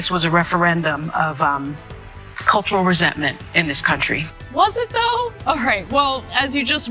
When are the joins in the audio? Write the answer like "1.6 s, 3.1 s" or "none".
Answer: 4.6 s